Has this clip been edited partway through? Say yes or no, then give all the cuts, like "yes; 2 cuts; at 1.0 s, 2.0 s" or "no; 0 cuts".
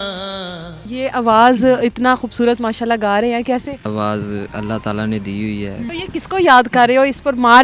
yes; 3 cuts; at 0.9 s, 3.9 s, 5.9 s